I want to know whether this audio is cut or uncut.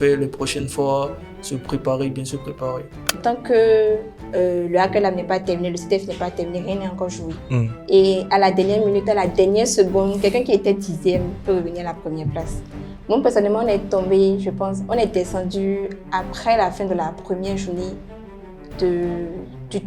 cut